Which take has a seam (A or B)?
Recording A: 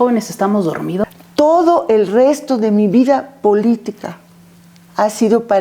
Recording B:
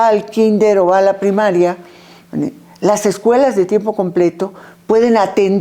A